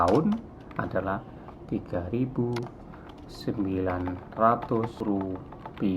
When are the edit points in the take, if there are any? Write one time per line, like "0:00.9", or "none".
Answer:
0:05.0